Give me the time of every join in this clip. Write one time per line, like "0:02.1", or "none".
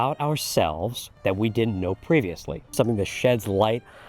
0:02.7